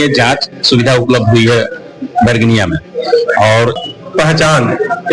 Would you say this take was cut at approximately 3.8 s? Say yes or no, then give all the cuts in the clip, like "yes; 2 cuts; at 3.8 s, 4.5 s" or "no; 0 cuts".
yes; 1 cut; at 3.8 s